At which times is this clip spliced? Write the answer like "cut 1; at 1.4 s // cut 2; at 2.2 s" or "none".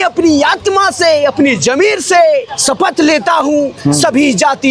cut 1; at 2.5 s